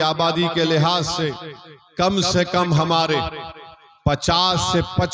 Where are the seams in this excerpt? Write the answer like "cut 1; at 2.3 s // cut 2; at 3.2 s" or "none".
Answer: none